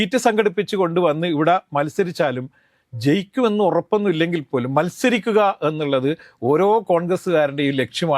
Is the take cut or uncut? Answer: uncut